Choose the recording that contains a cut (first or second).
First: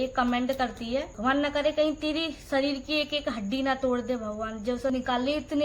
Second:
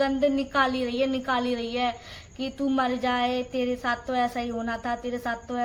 first